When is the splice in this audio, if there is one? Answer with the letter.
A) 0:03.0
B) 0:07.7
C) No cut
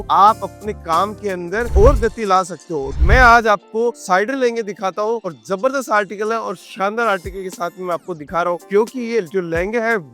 A